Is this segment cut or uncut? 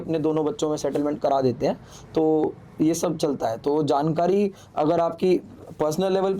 uncut